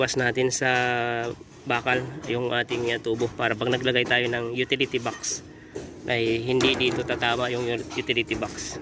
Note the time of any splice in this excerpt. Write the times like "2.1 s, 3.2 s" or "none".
none